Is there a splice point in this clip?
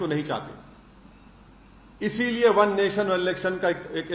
no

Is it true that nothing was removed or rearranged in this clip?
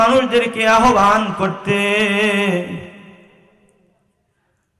yes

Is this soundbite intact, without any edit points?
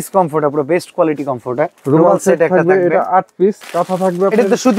no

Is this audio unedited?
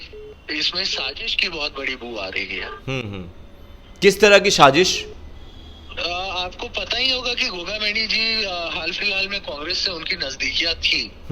yes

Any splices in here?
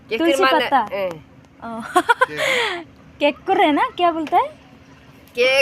yes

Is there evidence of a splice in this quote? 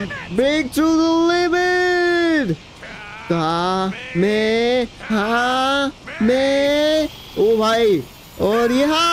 no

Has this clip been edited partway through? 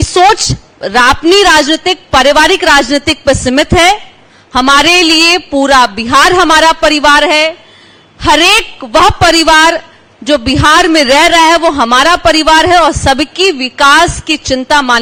no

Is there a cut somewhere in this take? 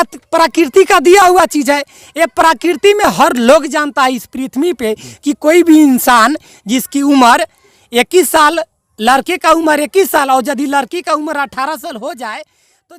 no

